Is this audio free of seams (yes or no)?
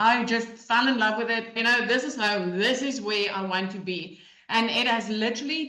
no